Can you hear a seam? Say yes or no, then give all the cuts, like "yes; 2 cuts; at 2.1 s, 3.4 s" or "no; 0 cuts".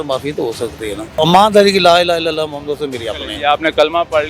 yes; 1 cut; at 1.1 s